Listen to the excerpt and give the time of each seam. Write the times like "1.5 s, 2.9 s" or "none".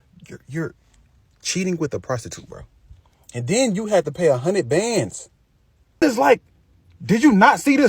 6.0 s